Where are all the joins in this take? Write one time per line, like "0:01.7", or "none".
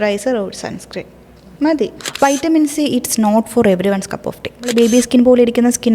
0:02.0
0:04.7